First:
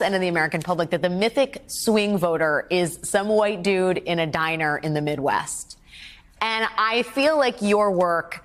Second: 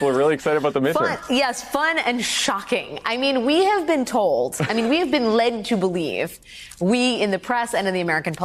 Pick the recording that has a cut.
first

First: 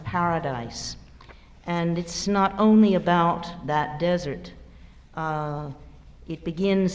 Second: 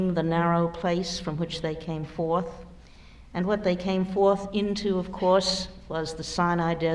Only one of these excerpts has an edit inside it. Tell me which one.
second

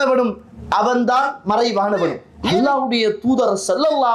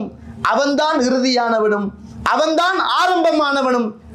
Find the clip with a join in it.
first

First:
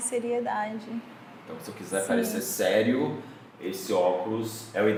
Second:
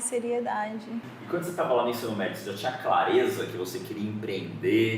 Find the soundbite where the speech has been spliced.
second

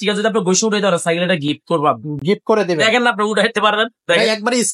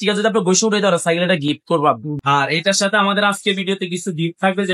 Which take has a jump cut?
second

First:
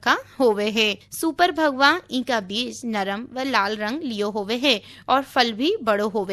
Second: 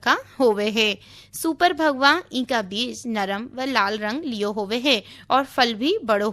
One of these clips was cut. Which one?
first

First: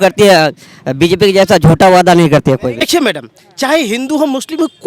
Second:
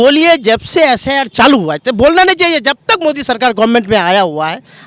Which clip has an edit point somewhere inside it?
first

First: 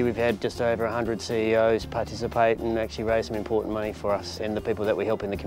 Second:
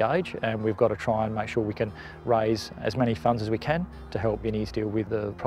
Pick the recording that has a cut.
first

